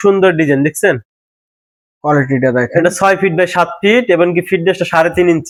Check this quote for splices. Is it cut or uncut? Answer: uncut